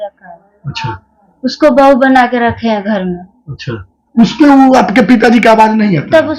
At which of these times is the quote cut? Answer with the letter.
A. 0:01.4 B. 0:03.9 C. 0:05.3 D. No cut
D